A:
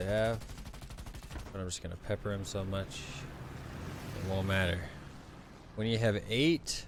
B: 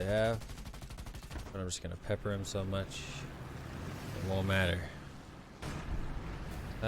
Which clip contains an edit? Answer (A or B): B